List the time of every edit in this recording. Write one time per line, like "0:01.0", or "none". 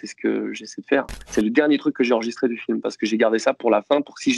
0:01.2